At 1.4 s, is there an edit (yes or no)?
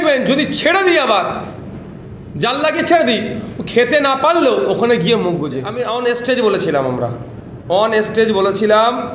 no